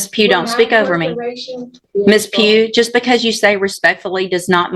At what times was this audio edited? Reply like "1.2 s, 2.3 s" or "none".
1.8 s